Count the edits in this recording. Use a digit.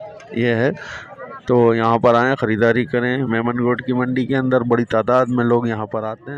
0